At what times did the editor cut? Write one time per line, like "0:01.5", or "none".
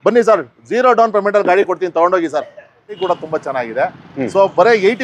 0:03.0